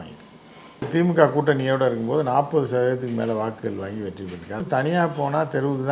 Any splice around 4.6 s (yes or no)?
yes